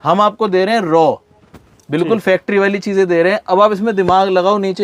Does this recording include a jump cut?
no; 0 cuts

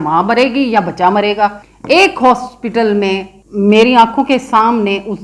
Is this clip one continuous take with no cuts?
no; 2 cuts; at 1.7 s, 3.4 s

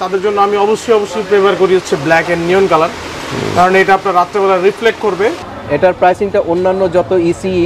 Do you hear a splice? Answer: yes; 1 cut; at 5.4 s

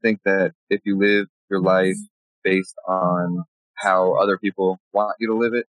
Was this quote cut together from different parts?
yes; 2 cuts; at 1.4 s, 3.0 s

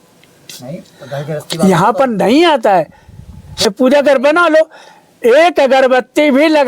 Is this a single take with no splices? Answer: no; 1 cut; at 3.7 s

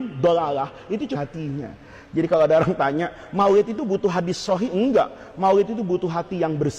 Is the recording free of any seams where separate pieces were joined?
no; 1 cut; at 1.1 s

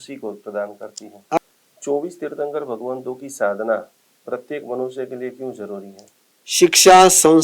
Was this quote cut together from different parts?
yes; 2 cuts; at 1.4 s, 6.0 s

